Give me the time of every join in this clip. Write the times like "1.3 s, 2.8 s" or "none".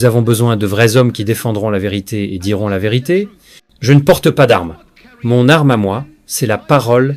none